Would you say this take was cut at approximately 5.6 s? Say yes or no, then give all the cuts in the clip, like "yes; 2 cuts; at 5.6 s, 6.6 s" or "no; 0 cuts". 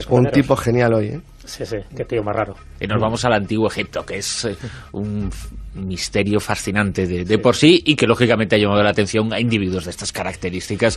no; 1 cut; at 9.5 s